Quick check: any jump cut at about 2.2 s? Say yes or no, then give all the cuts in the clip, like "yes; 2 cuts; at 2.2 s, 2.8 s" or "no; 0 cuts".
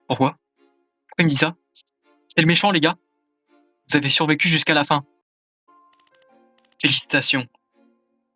no; 1 cut; at 5.6 s